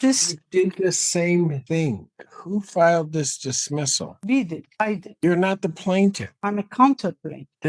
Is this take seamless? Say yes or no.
no